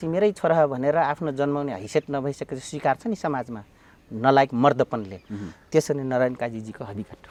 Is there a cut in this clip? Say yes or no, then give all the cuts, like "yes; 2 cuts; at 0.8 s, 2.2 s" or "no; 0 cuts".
no; 0 cuts